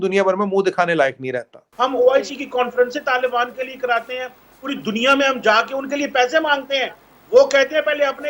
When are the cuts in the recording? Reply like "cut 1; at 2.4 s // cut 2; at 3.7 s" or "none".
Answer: cut 1; at 1.7 s